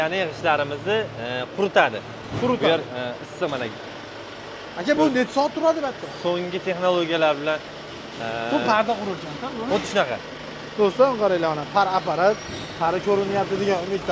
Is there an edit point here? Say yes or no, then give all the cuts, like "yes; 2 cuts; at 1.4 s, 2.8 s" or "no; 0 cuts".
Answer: no; 0 cuts